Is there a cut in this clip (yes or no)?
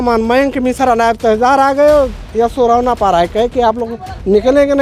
no